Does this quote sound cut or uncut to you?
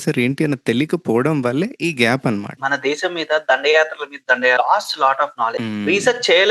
cut